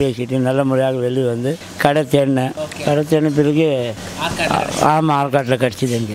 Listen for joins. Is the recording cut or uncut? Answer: uncut